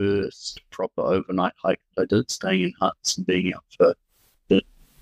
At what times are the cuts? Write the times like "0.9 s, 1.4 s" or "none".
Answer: none